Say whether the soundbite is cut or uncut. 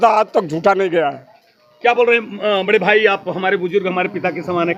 uncut